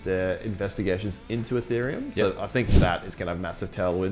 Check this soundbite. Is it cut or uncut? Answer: uncut